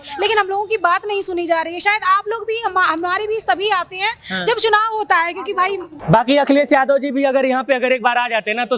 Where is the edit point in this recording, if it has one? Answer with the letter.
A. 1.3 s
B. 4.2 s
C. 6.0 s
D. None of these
C